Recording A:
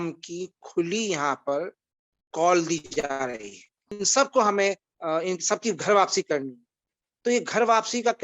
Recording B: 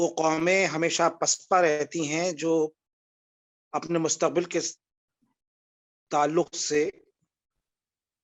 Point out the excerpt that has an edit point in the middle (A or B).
A